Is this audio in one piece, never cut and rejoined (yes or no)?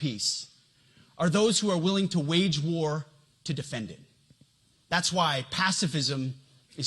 no